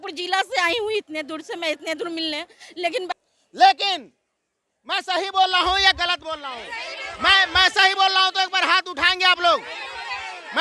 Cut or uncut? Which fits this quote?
cut